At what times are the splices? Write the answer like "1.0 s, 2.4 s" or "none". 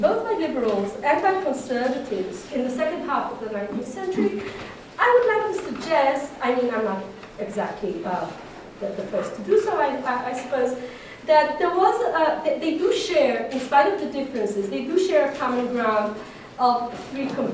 6.5 s